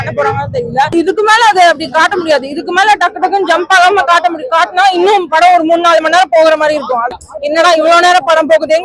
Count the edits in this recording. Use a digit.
2